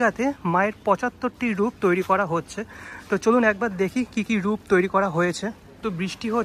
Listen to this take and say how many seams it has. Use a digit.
0